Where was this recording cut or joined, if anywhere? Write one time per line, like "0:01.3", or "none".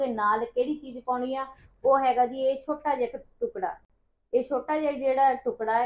none